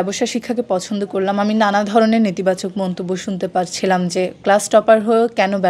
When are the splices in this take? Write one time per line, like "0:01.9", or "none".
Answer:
none